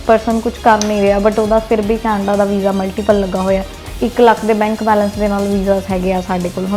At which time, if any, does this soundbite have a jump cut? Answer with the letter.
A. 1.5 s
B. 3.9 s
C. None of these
B